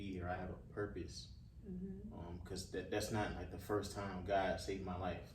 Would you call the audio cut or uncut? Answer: uncut